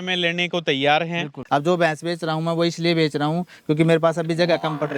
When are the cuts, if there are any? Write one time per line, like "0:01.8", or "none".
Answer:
0:01.4